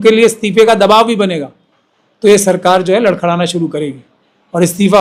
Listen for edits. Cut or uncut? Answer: uncut